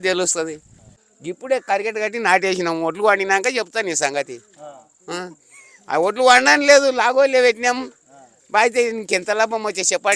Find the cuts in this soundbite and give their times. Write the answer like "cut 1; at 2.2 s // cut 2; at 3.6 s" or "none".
cut 1; at 0.9 s